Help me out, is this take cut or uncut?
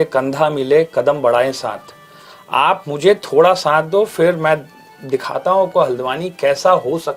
uncut